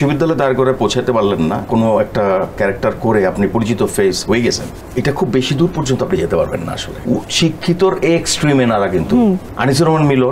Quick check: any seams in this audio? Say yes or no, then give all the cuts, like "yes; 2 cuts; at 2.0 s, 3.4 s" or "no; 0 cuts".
yes; 4 cuts; at 1.7 s, 4.7 s, 6.9 s, 9.5 s